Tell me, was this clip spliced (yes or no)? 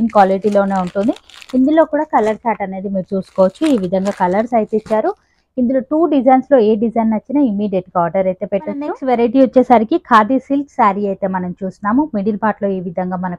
no